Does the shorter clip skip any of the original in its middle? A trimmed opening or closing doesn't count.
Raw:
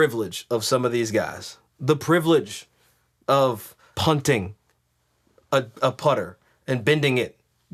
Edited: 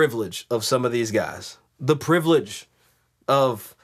no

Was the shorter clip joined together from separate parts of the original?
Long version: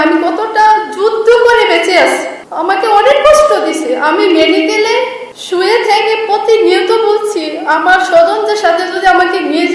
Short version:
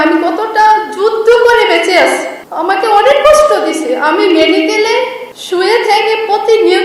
no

